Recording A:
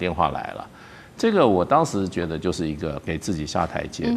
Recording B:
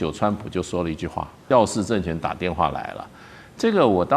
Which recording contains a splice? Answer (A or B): B